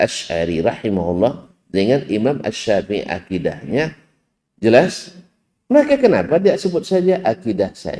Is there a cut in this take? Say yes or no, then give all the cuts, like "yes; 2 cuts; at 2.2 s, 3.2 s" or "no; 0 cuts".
no; 0 cuts